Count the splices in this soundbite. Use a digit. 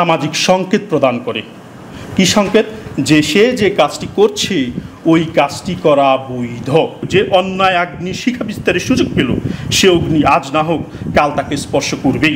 1